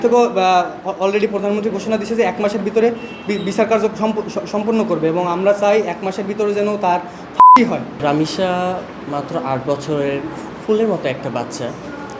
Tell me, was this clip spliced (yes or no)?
no